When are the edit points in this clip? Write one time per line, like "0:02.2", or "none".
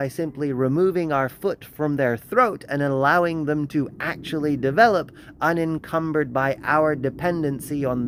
none